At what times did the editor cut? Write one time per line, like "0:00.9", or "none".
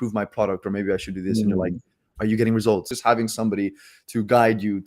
0:02.9